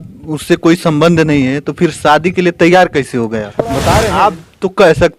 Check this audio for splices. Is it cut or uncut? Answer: cut